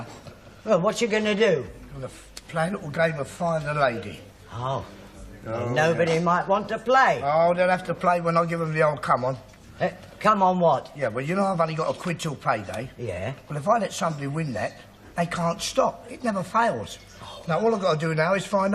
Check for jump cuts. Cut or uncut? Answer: cut